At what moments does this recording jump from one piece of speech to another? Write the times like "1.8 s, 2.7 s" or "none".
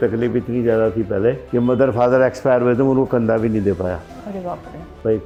none